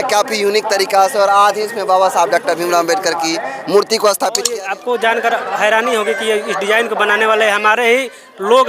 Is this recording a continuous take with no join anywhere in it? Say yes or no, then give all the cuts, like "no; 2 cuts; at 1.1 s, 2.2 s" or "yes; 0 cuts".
no; 1 cut; at 4.4 s